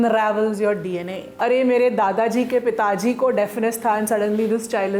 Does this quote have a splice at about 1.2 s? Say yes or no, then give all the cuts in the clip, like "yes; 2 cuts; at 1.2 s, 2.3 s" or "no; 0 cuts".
yes; 1 cut; at 1.2 s